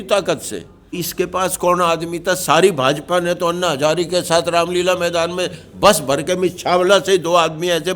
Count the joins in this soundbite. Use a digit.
1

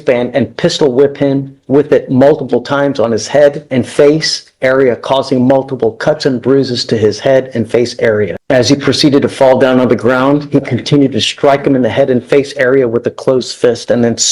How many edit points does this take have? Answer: 2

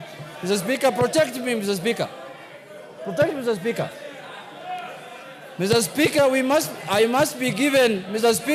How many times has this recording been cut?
0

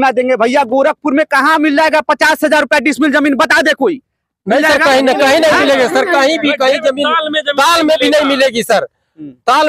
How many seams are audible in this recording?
0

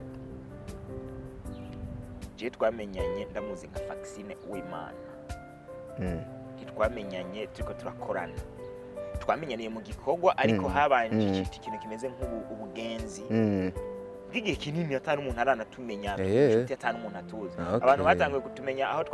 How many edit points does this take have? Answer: 0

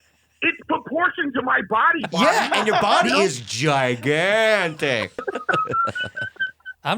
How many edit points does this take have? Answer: 1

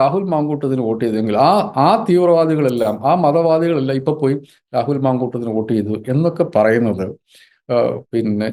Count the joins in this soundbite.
0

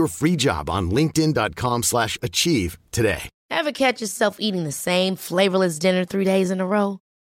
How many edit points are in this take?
1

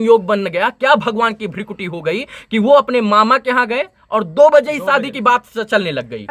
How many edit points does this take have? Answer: 0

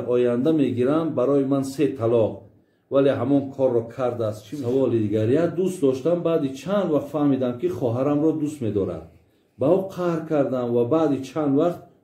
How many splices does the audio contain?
1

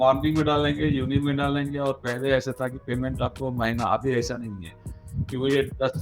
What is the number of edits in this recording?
0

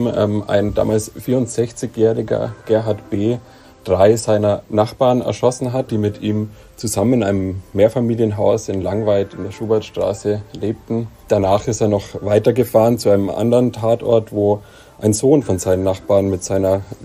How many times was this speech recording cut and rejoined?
2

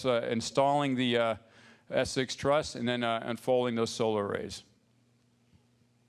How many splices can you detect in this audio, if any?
1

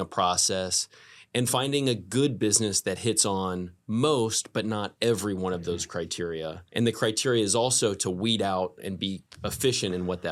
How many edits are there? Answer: 1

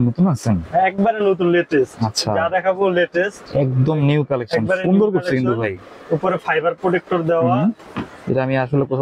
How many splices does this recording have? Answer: 1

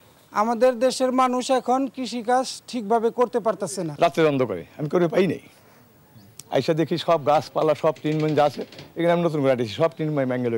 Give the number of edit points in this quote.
1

